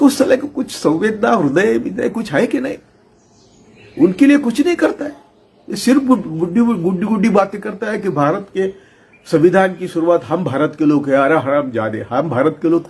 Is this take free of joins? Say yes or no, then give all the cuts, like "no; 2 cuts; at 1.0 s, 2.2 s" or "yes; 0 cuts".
yes; 0 cuts